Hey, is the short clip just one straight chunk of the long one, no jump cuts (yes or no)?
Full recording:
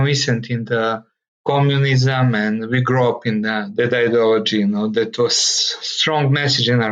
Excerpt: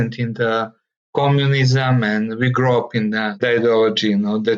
no